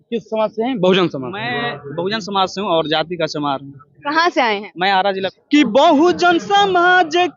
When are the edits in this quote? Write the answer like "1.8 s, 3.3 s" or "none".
5.3 s